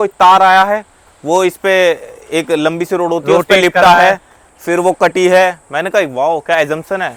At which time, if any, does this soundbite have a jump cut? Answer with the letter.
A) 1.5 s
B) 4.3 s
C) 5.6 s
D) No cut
D